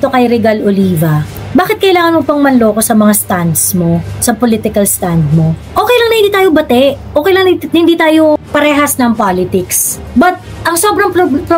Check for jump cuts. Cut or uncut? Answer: cut